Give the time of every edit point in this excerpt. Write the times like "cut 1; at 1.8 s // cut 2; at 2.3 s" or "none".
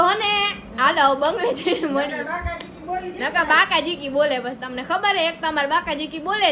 none